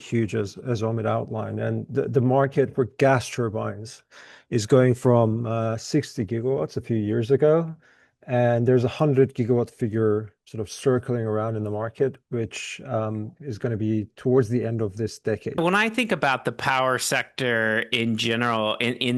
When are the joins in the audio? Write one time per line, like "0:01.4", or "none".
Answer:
0:15.6